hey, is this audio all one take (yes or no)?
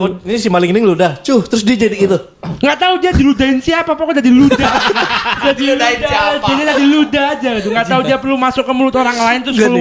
yes